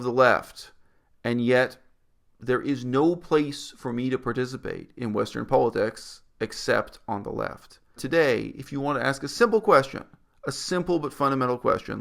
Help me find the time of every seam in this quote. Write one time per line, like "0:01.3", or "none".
0:08.0